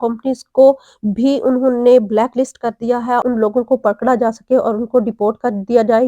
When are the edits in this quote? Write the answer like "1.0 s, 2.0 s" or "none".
3.2 s